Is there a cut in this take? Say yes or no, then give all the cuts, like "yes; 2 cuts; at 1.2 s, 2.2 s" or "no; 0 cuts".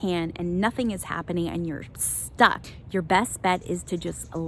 yes; 1 cut; at 2.7 s